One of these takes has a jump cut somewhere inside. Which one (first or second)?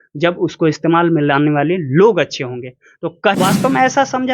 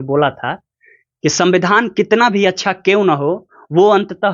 first